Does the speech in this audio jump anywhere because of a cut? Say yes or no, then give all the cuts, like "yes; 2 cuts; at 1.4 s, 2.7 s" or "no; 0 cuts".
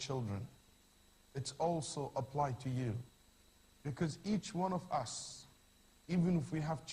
yes; 1 cut; at 3.3 s